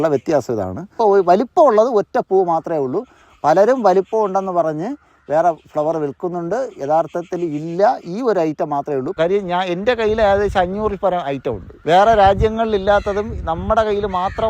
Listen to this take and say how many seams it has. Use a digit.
2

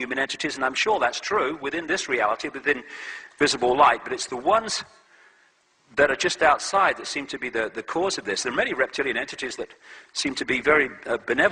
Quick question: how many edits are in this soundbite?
0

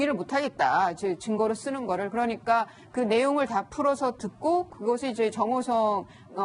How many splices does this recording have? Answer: 1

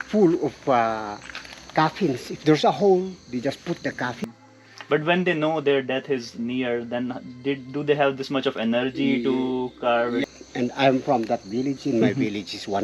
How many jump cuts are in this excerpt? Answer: 2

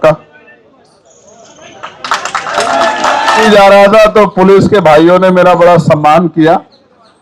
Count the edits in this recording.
1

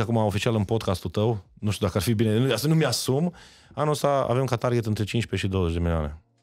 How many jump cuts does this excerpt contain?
0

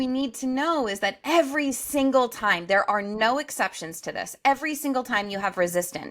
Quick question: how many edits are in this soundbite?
0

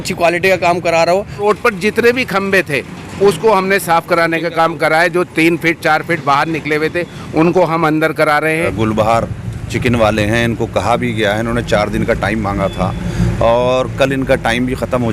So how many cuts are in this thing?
2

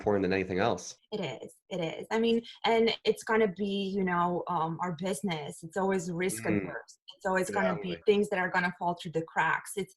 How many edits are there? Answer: 2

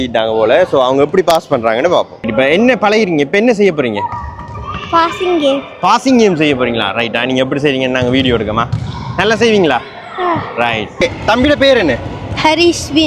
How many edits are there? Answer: 2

